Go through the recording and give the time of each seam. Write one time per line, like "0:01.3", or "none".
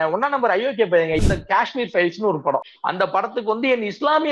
0:01.2
0:02.8

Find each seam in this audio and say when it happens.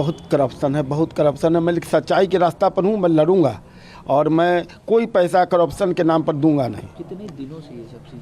none

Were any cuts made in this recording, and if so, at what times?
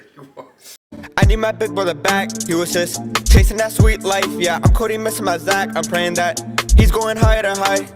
0:00.9

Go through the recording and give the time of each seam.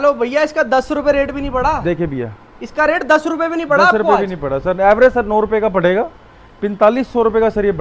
none

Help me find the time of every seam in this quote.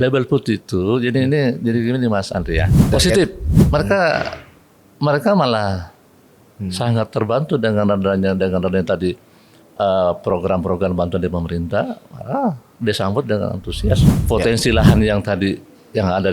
0:02.8
0:14.1

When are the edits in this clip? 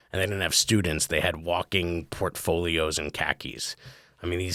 none

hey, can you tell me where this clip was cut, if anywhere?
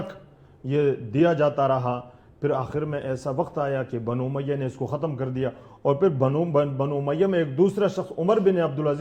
none

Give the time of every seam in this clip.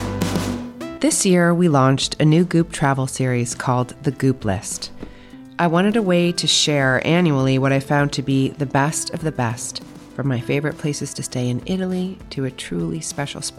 0:00.9

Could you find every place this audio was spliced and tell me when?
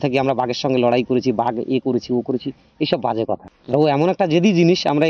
0:03.5

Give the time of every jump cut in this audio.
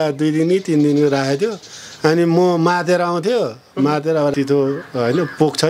0:04.3

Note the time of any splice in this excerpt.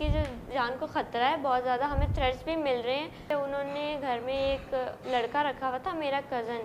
0:03.3

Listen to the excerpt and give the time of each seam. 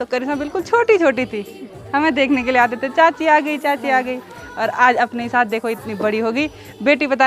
none

